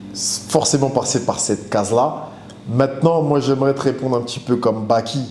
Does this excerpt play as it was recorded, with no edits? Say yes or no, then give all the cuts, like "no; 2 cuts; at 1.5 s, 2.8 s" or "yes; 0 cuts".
yes; 0 cuts